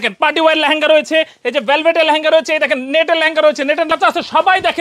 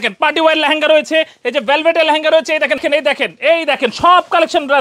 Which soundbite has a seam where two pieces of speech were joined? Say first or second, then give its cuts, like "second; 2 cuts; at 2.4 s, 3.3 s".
second; 1 cut; at 2.8 s